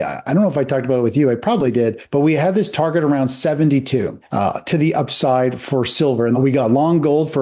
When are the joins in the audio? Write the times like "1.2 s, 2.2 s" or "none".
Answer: 2.0 s, 6.3 s